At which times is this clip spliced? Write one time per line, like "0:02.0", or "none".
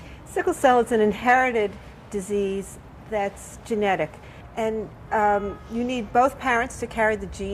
0:06.2